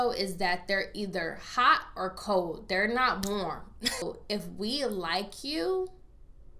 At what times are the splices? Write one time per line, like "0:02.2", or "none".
0:04.0